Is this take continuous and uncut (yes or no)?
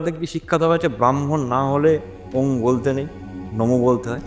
yes